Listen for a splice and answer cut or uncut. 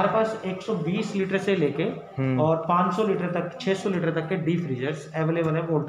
uncut